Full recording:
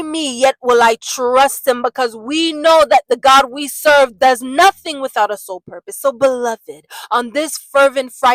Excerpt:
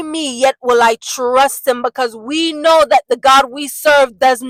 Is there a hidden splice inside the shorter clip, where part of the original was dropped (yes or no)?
no